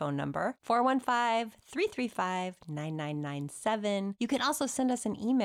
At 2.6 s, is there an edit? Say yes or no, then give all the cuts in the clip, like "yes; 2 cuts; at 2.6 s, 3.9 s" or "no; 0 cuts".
no; 1 cut; at 4.1 s